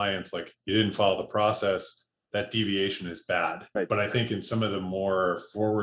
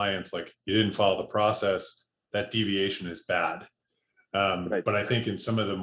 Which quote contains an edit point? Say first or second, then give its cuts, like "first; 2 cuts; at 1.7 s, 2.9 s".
first; 1 cut; at 3.7 s